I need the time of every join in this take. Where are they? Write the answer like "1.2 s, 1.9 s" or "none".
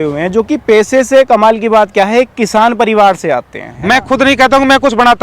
3.6 s